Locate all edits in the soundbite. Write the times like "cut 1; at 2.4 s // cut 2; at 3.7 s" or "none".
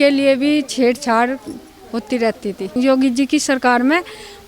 cut 1; at 2.7 s